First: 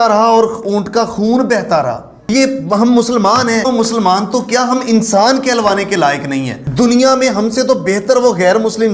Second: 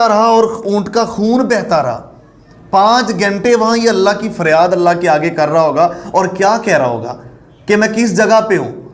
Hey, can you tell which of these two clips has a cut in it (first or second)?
first